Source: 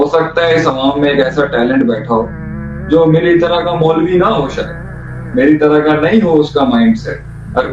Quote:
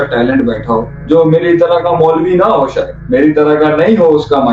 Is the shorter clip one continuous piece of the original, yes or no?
no